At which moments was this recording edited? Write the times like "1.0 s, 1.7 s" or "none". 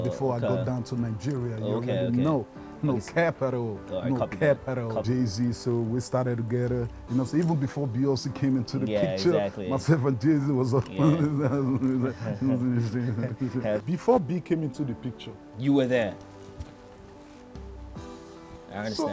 5.0 s, 13.8 s